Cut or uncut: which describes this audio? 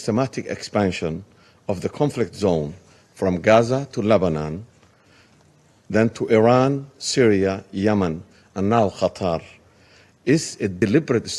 uncut